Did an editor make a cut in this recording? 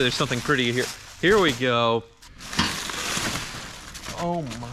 yes; 1 cut; at 2.2 s

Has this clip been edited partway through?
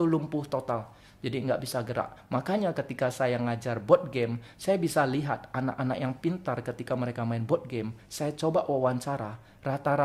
no; 0 cuts

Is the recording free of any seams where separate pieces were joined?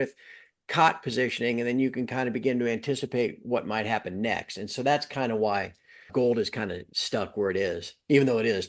no; 1 cut; at 6.1 s

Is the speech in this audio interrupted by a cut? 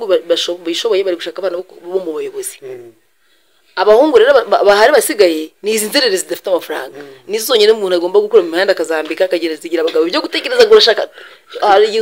no; 0 cuts

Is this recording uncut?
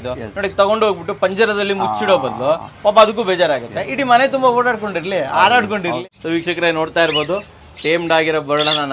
no; 1 cut; at 6.0 s

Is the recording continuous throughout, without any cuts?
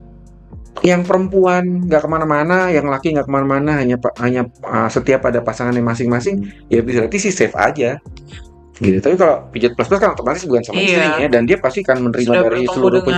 yes; 0 cuts

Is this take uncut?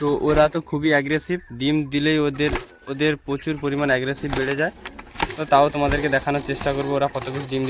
yes; 0 cuts

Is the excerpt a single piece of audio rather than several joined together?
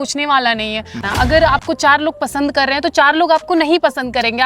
no; 1 cut; at 1.0 s

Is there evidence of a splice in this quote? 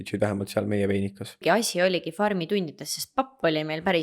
yes; 1 cut; at 1.4 s

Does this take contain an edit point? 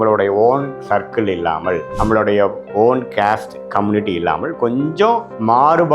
no; 0 cuts

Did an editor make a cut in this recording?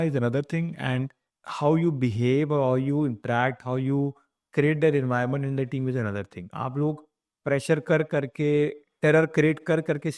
no; 0 cuts

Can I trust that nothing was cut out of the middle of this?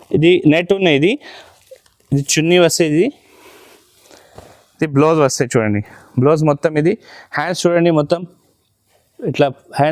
yes; 0 cuts

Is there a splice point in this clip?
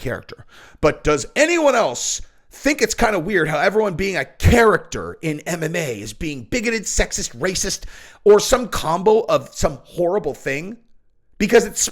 no; 0 cuts

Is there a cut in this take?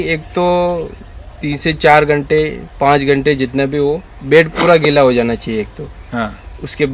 no; 0 cuts

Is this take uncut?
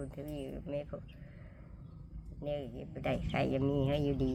yes; 0 cuts

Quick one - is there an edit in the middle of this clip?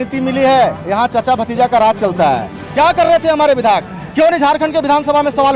yes; 1 cut; at 2.6 s

